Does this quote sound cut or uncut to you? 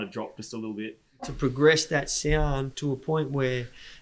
cut